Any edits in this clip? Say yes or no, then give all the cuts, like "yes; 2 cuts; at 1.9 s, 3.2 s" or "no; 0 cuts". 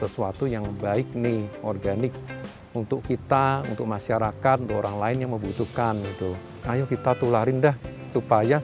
yes; 1 cut; at 6.5 s